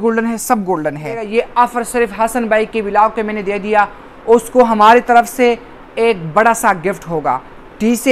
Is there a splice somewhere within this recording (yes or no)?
yes